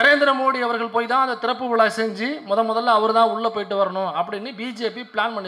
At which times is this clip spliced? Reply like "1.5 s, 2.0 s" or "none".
none